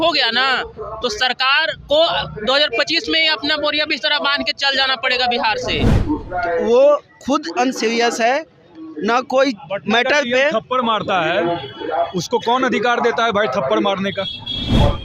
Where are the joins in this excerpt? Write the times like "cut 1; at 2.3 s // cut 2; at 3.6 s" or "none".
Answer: cut 1; at 5.9 s